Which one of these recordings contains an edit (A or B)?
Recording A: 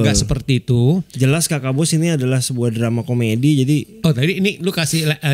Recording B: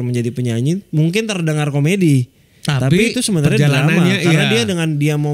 A